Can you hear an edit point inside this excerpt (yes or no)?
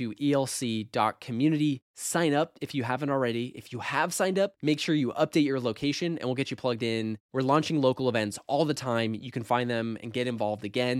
no